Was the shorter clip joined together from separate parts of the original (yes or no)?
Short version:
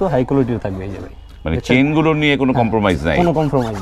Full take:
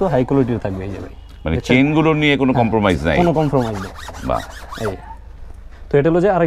no